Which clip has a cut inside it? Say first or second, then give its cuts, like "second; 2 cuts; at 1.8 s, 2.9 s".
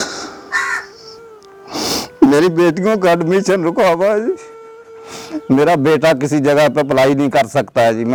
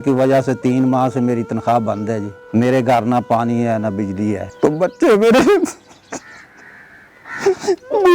second; 2 cuts; at 2.3 s, 4.5 s